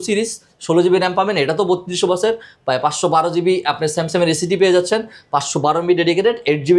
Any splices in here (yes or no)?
no